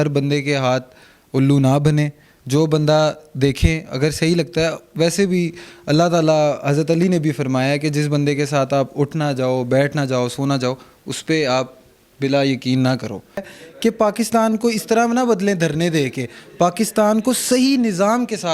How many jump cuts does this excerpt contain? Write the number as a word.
one